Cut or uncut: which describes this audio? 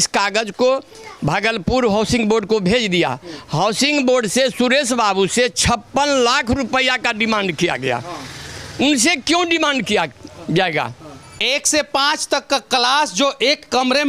cut